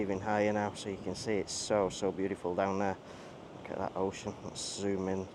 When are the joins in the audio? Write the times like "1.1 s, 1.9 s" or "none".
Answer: none